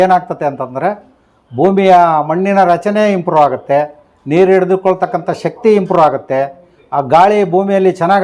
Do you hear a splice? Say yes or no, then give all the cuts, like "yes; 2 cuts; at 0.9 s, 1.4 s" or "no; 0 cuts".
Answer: no; 0 cuts